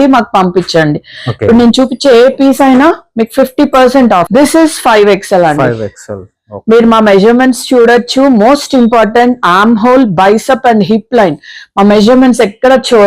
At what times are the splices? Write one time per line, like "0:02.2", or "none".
0:04.3